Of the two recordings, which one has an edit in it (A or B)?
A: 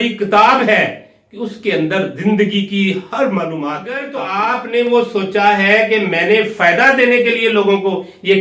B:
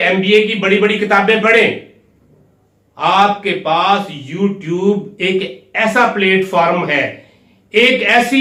A